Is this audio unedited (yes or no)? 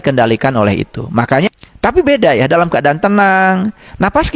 no